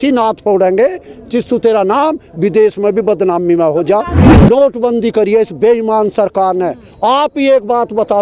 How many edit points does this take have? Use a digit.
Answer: 1